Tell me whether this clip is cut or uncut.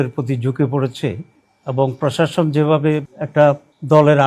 cut